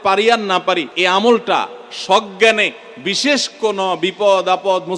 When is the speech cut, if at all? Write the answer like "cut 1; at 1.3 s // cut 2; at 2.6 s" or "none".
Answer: cut 1; at 0.9 s